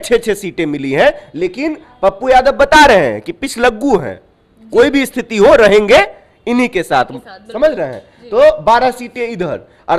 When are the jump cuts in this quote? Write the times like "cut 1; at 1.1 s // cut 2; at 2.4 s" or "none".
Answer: none

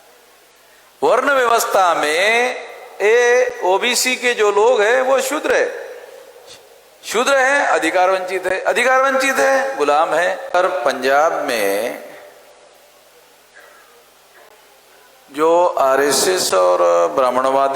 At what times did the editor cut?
cut 1; at 10.5 s

